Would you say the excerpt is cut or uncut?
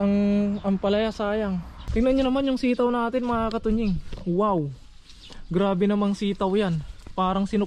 cut